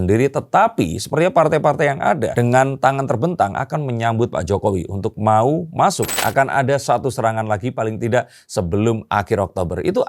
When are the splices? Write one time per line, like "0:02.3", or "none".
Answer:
0:06.2